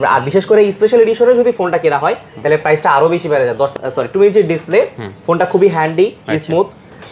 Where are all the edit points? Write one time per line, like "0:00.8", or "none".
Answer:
0:03.7